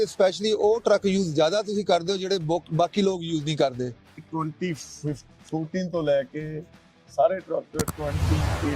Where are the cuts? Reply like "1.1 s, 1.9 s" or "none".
4.3 s